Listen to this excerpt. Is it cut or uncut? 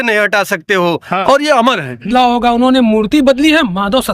cut